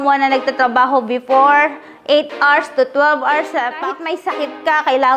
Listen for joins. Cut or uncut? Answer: cut